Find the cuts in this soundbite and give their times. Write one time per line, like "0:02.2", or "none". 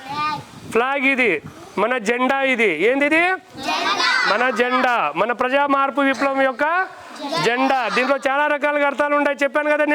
none